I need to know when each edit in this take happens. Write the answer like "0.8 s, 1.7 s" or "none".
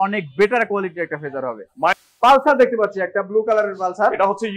2.1 s